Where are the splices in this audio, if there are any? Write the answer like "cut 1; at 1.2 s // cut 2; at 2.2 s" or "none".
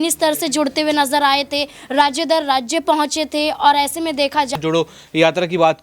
cut 1; at 4.6 s